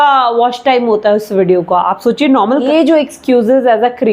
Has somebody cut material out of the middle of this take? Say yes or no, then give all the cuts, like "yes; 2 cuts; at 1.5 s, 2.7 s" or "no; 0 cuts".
yes; 1 cut; at 2.6 s